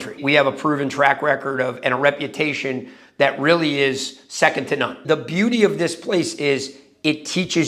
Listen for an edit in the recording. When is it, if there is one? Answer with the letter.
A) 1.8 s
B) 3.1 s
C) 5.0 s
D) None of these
C